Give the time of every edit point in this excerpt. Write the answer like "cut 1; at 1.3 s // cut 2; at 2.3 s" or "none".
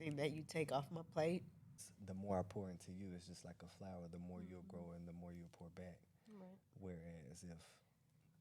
cut 1; at 1.9 s